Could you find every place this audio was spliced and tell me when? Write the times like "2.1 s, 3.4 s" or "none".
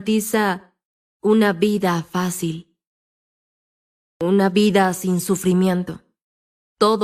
none